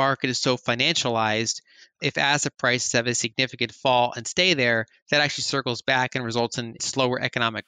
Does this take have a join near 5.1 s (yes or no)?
no